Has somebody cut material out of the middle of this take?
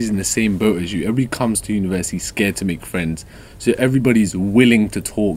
no; 0 cuts

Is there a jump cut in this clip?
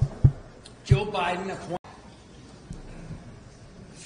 yes; 1 cut; at 1.8 s

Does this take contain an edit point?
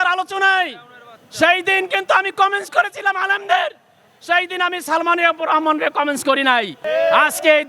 yes; 1 cut; at 6.8 s

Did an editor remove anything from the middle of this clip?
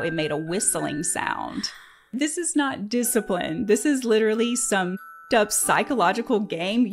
yes; 2 cuts; at 2.1 s, 5.2 s

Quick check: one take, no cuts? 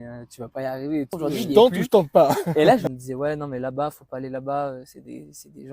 no; 2 cuts; at 1.1 s, 2.9 s

